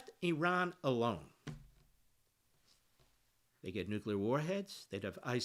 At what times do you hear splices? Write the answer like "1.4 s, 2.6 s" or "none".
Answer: none